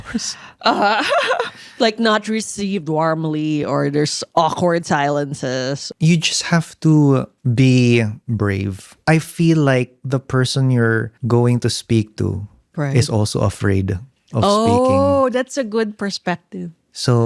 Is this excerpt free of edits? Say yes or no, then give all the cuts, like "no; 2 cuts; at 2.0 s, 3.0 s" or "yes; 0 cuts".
no; 5 cuts; at 4.2 s, 5.9 s, 7.4 s, 8.2 s, 11.1 s